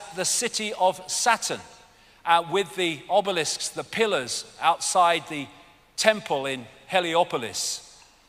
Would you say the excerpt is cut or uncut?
uncut